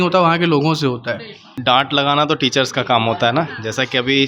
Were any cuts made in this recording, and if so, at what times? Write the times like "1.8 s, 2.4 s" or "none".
1.5 s

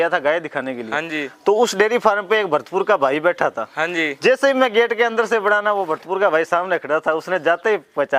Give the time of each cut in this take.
none

